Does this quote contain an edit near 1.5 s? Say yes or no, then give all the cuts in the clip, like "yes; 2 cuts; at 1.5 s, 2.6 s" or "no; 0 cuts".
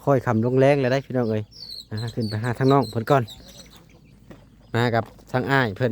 no; 1 cut; at 4.2 s